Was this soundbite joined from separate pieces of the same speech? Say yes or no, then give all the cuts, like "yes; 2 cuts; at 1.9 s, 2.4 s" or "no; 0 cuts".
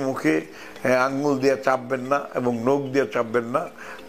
no; 0 cuts